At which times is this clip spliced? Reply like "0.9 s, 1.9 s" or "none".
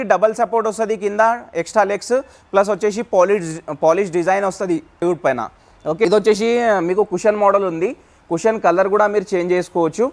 none